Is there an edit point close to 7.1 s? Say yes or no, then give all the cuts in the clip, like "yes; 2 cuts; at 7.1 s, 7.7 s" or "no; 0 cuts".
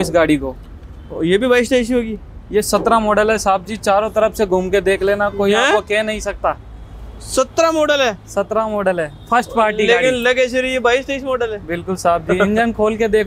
no; 0 cuts